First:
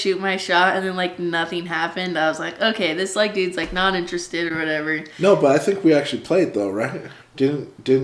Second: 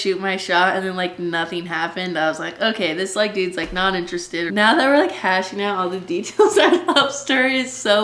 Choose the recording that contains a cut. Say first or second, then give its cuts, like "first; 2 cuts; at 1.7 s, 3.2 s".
second; 1 cut; at 4.5 s